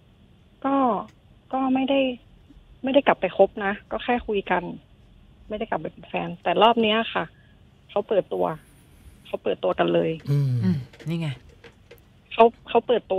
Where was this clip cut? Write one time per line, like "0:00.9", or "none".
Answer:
none